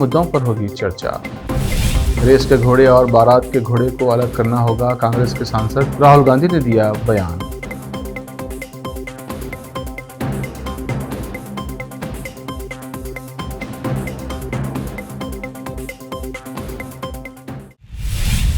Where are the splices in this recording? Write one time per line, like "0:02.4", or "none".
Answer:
0:17.7